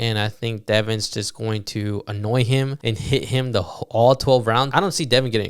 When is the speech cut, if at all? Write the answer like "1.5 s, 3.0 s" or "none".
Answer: 2.8 s, 4.7 s